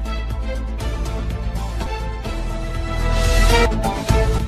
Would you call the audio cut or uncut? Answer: cut